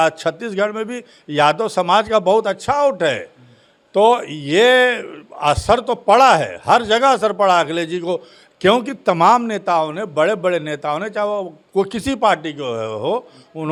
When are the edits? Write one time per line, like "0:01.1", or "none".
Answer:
none